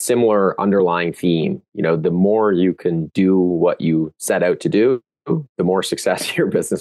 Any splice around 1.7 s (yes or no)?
no